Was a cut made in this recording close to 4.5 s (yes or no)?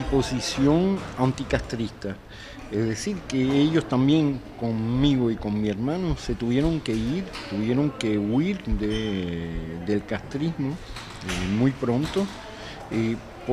no